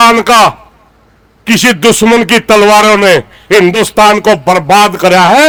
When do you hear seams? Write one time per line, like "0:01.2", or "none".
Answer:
none